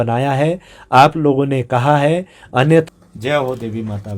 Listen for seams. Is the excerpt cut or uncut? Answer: cut